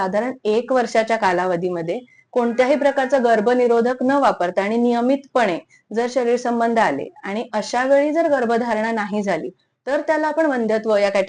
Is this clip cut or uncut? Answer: uncut